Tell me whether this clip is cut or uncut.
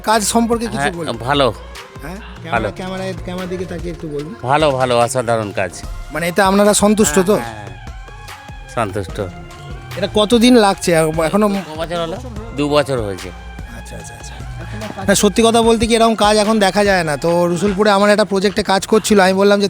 uncut